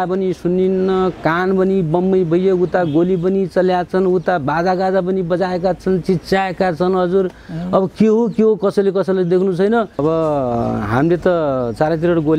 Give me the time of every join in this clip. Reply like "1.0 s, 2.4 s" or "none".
10.0 s